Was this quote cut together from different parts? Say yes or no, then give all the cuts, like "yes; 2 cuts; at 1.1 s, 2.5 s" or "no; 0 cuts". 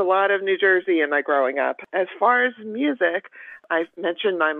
yes; 2 cuts; at 1.8 s, 3.6 s